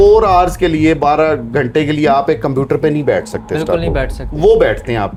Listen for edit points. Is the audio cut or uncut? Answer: uncut